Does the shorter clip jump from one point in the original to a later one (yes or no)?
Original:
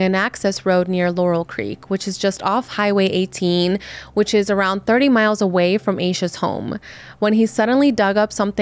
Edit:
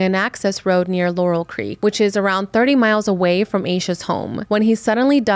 yes